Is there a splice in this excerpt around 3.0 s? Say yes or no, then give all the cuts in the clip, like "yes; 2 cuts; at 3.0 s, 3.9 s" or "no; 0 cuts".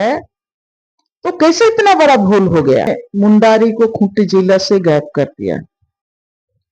yes; 1 cut; at 3.0 s